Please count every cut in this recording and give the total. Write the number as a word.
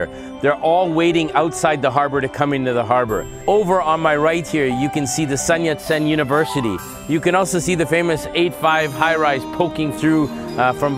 two